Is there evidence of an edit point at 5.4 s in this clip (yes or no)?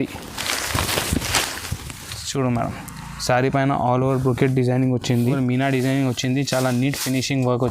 yes